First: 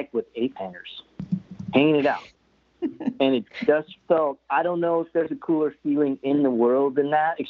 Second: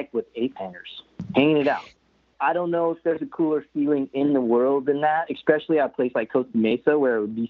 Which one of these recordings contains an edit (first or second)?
second